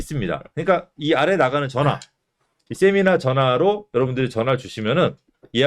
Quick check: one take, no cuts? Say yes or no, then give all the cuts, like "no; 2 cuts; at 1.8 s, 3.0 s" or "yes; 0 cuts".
yes; 0 cuts